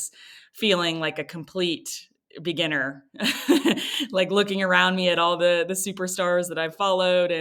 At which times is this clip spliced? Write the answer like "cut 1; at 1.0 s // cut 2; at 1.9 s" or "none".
none